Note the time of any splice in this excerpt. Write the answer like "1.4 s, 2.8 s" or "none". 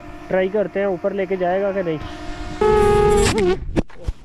2.6 s